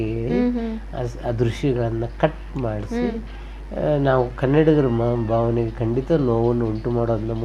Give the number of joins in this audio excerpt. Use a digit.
0